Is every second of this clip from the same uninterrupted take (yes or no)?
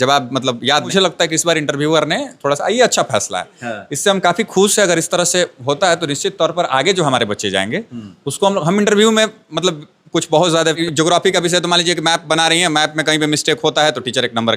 no